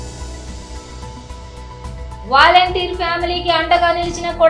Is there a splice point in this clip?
no; 0 cuts

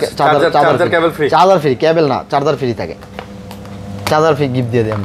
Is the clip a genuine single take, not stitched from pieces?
yes; 0 cuts

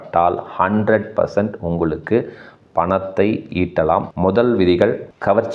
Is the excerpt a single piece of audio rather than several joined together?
no; 1 cut; at 4.1 s

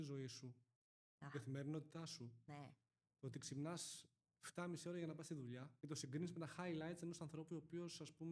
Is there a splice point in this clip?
yes; 1 cut; at 5.7 s

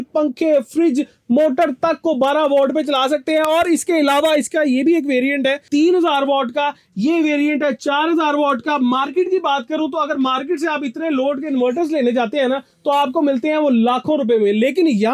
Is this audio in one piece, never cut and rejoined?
yes; 0 cuts

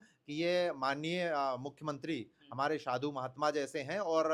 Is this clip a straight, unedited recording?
yes; 0 cuts

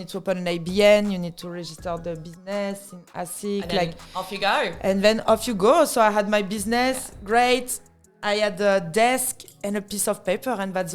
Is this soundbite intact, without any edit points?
yes; 0 cuts

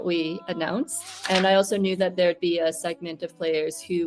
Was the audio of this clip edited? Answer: yes; 1 cut; at 1.1 s

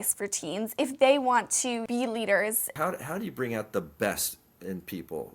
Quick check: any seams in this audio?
yes; 2 cuts; at 1.8 s, 2.8 s

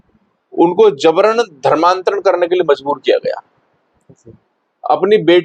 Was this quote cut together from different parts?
no; 0 cuts

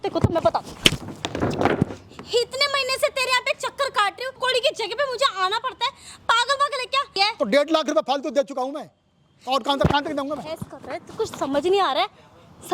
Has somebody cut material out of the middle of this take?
yes; 2 cuts; at 4.4 s, 7.2 s

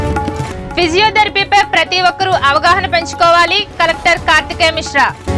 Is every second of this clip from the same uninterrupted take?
yes; 0 cuts

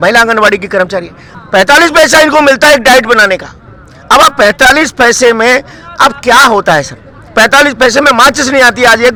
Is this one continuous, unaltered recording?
yes; 0 cuts

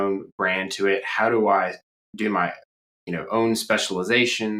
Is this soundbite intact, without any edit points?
yes; 0 cuts

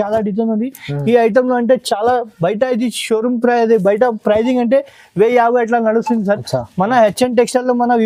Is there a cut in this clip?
no; 0 cuts

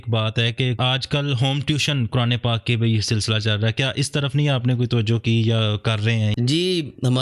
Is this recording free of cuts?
yes; 0 cuts

